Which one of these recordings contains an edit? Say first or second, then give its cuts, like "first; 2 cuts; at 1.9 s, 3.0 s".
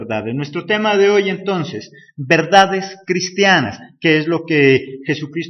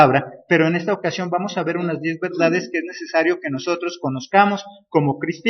second; 1 cut; at 3.7 s